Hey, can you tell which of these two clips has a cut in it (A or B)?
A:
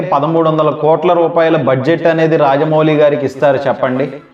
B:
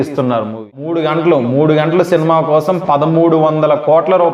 B